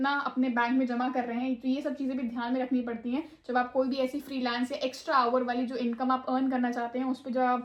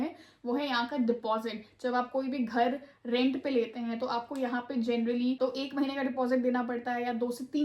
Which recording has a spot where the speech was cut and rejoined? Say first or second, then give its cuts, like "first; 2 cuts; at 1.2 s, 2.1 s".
second; 1 cut; at 5.4 s